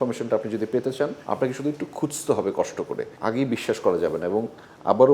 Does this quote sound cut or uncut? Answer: cut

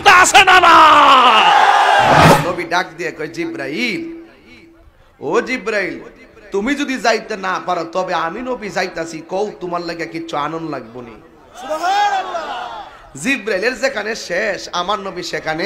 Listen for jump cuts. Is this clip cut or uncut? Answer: cut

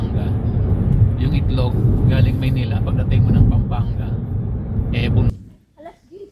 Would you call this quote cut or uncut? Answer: cut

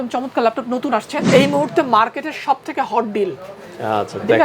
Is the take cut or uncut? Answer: cut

